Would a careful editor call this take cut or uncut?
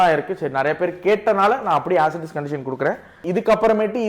cut